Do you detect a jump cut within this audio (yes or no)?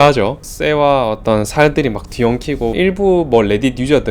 yes